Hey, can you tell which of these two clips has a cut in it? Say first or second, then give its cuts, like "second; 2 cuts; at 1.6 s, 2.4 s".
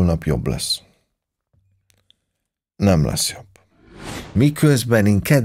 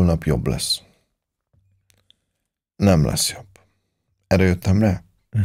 first; 1 cut; at 4.1 s